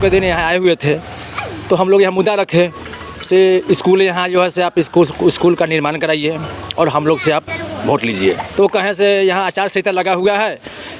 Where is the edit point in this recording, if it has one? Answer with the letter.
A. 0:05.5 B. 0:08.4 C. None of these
B